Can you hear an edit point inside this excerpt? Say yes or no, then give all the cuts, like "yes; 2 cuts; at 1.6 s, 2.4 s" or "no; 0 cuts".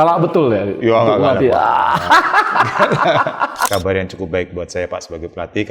yes; 1 cut; at 3.6 s